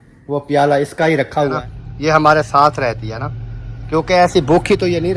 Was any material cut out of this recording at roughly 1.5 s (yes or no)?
yes